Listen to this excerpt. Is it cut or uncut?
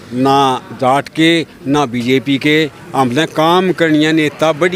uncut